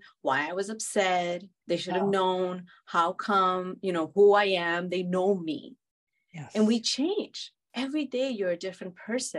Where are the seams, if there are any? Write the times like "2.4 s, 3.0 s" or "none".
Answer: 1.5 s